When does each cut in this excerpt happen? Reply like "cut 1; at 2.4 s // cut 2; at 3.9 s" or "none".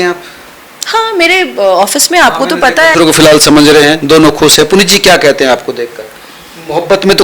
cut 1; at 2.9 s